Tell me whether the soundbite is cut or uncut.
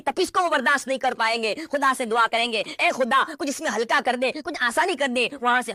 uncut